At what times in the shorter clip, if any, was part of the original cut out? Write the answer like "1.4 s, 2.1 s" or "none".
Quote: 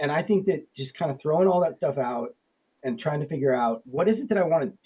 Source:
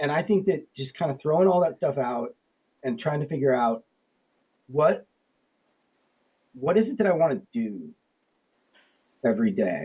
3.8 s